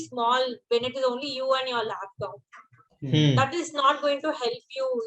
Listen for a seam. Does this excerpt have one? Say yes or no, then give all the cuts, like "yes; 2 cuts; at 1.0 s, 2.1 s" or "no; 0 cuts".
no; 0 cuts